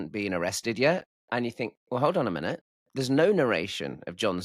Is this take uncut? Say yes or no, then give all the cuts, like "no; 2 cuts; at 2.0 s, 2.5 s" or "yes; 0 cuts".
no; 1 cut; at 1.2 s